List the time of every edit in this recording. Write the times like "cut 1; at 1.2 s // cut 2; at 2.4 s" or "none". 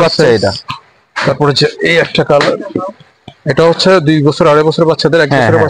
none